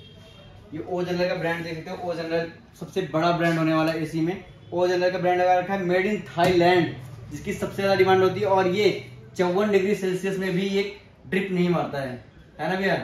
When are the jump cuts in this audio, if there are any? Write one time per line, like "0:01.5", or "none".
none